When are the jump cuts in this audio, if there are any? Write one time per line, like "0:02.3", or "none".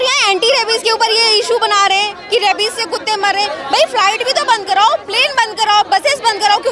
none